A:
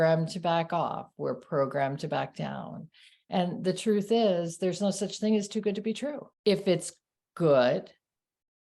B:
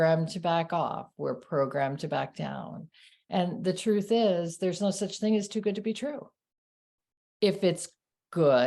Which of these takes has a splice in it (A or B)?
A